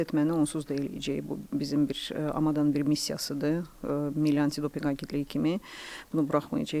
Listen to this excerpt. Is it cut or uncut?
uncut